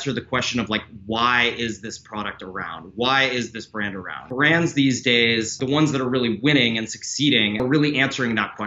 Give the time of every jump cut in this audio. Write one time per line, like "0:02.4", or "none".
0:04.2
0:05.6
0:07.6